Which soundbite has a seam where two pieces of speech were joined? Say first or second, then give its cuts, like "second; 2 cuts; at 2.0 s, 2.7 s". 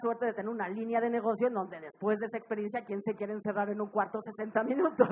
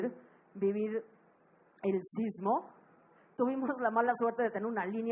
second; 1 cut; at 3.2 s